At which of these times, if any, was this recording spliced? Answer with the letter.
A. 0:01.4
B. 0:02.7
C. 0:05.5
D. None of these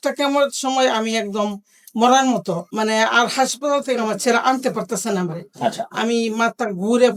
B